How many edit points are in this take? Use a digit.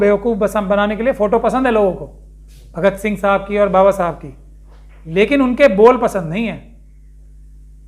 0